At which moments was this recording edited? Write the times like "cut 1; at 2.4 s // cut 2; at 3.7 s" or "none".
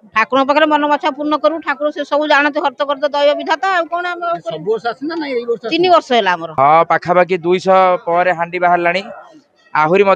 cut 1; at 6.5 s